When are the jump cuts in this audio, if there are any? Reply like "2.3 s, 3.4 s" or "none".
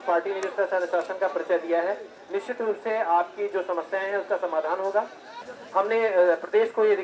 5.5 s